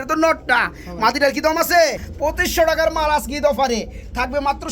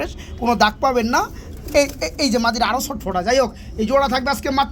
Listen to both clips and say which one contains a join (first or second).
first